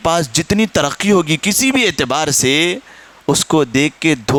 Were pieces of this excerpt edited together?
no; 0 cuts

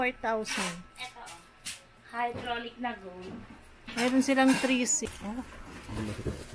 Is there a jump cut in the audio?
yes; 1 cut; at 5.1 s

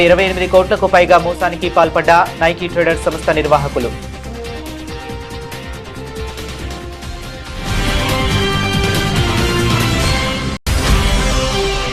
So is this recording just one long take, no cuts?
no; 2 cuts; at 3.9 s, 10.6 s

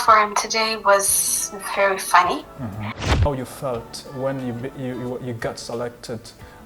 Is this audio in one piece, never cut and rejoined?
no; 1 cut; at 3.1 s

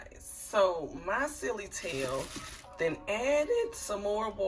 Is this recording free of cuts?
yes; 0 cuts

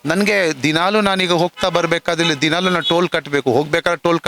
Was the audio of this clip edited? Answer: no; 0 cuts

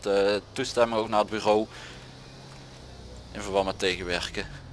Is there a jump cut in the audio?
no; 0 cuts

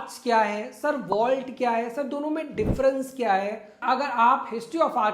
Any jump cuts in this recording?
yes; 1 cut; at 3.7 s

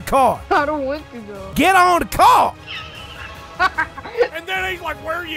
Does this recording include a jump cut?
yes; 1 cut; at 4.3 s

